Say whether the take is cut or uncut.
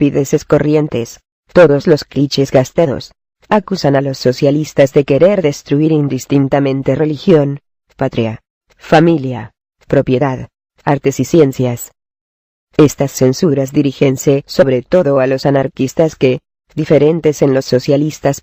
cut